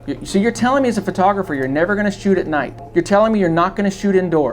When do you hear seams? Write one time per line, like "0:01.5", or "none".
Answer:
0:02.8